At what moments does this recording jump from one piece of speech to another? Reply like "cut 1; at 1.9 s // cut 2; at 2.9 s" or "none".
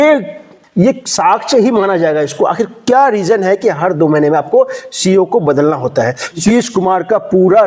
cut 1; at 6.4 s